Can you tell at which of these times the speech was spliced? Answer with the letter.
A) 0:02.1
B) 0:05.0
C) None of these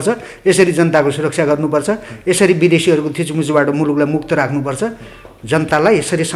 C